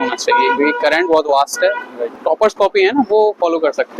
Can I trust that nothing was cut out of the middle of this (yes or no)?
no